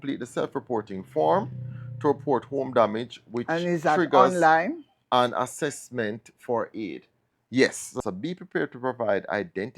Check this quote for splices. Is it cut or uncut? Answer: cut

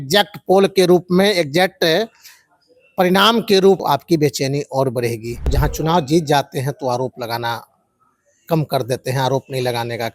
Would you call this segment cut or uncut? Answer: cut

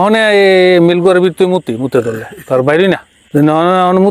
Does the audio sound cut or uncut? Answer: cut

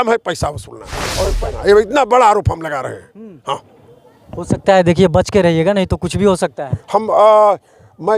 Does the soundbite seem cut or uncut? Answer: cut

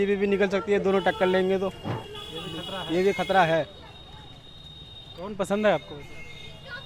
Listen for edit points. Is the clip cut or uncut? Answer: uncut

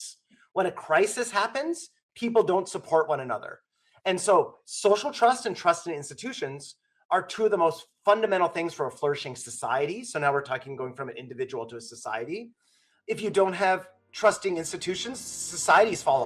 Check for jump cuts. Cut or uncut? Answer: uncut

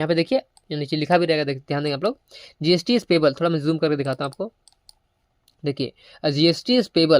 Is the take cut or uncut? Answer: uncut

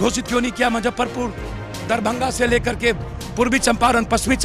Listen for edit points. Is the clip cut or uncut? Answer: uncut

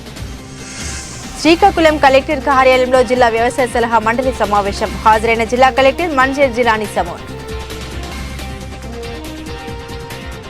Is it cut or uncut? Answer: uncut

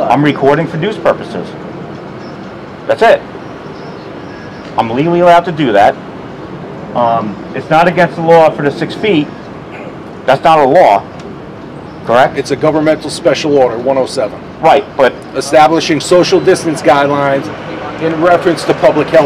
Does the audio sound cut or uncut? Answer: uncut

